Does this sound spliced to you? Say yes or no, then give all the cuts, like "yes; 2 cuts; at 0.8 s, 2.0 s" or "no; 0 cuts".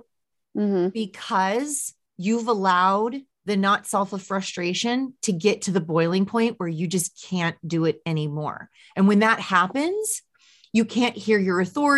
yes; 1 cut; at 3.3 s